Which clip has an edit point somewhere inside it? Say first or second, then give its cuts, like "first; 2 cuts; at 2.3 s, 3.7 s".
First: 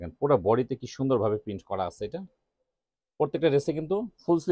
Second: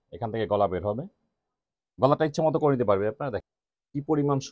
second; 1 cut; at 3.5 s